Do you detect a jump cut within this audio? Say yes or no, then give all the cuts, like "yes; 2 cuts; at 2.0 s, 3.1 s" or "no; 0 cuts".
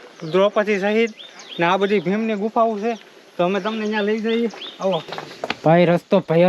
yes; 1 cut; at 5.1 s